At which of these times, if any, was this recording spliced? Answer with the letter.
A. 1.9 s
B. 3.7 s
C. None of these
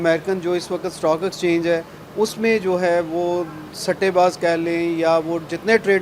C